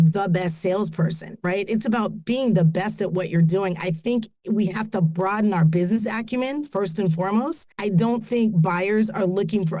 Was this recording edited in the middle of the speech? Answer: yes; 1 cut; at 7.6 s

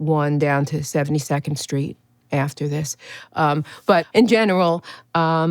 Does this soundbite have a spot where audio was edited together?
yes; 1 cut; at 4.0 s

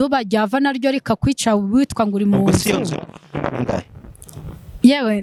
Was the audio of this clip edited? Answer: no; 0 cuts

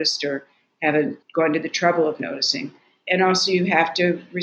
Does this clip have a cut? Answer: yes; 2 cuts; at 1.2 s, 3.0 s

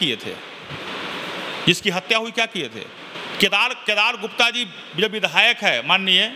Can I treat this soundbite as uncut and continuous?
yes; 0 cuts

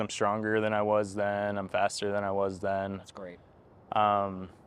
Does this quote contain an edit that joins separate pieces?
no; 0 cuts

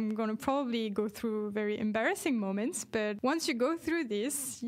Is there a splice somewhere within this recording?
yes; 1 cut; at 3.2 s

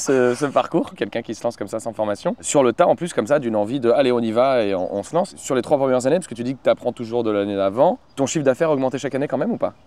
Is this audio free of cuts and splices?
yes; 0 cuts

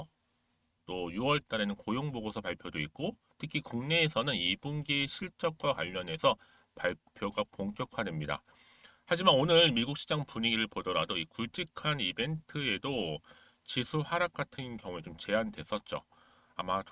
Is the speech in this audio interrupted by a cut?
no; 0 cuts

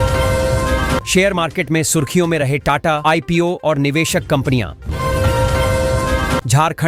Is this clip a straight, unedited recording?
yes; 0 cuts

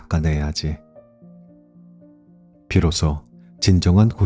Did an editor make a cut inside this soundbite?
yes; 2 cuts; at 0.8 s, 2.2 s

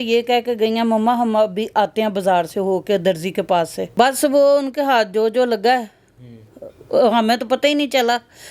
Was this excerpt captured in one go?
no; 1 cut; at 3.9 s

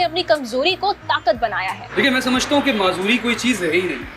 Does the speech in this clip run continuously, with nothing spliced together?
no; 1 cut; at 1.8 s

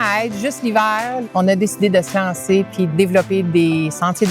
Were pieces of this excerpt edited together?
yes; 2 cuts; at 1.2 s, 2.9 s

